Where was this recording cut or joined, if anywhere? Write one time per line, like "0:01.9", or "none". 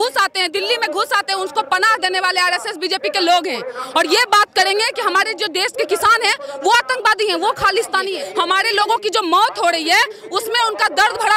0:08.2